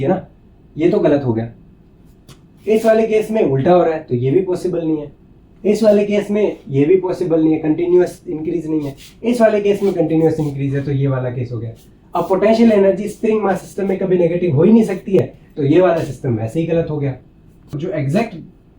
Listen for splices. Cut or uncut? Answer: cut